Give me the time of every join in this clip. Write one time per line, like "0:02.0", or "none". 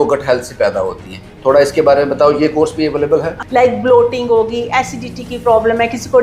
0:03.4